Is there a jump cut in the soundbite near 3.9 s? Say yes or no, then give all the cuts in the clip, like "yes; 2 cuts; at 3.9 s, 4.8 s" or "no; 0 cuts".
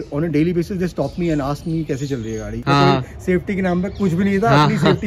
no; 1 cut; at 2.6 s